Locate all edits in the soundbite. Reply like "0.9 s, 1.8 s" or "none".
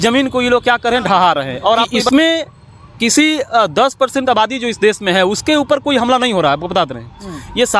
2.0 s